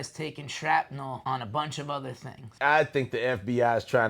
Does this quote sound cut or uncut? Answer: cut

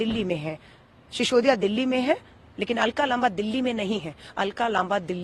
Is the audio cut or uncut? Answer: uncut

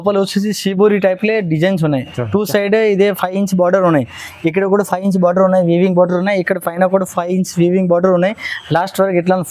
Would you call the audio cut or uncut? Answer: uncut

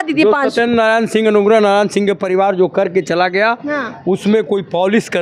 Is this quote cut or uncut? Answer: uncut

